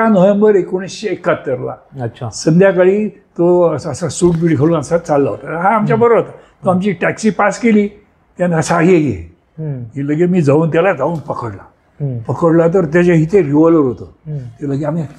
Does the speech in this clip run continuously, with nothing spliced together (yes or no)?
yes